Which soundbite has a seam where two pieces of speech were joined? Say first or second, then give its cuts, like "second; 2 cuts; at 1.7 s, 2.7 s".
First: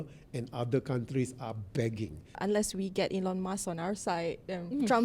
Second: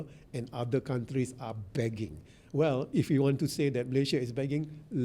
first; 1 cut; at 2.3 s